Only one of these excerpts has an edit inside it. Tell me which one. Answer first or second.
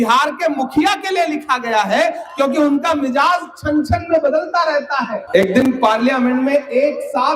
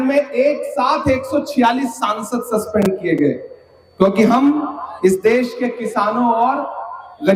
first